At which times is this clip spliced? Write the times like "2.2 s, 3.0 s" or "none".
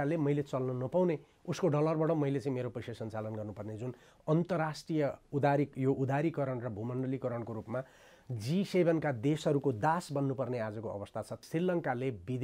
11.4 s